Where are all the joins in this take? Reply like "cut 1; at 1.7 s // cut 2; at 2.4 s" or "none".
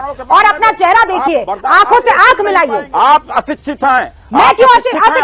cut 1; at 2.9 s